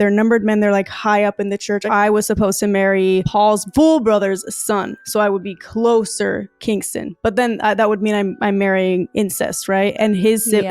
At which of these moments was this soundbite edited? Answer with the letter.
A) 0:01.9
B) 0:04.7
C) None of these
A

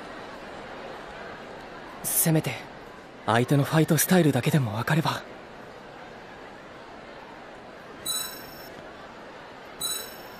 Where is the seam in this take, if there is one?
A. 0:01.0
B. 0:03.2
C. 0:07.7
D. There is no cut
A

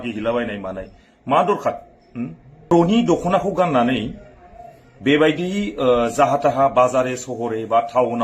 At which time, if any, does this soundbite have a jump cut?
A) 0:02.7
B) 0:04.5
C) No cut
A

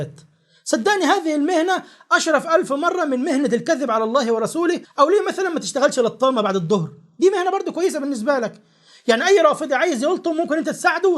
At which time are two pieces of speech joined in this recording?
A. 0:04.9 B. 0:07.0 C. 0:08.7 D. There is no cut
A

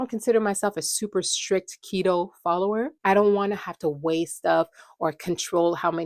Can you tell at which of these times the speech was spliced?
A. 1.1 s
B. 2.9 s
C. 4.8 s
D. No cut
B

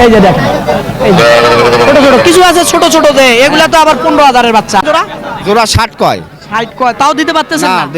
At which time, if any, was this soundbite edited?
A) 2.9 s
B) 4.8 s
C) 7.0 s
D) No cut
B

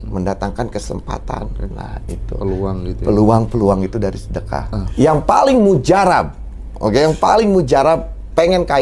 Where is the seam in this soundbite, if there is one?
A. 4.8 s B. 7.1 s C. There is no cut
A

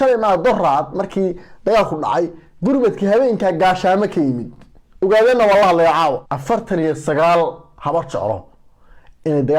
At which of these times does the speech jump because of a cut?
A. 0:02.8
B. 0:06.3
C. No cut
B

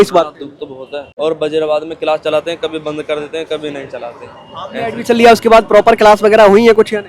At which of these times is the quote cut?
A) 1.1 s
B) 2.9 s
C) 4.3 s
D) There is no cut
A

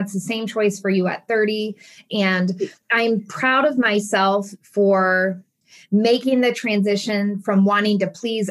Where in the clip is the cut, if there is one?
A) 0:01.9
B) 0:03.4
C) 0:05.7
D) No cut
A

